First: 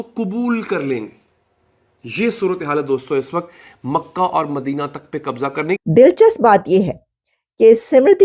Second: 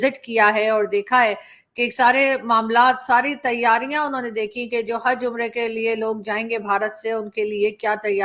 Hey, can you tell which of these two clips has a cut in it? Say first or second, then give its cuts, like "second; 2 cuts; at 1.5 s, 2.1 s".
first; 1 cut; at 5.8 s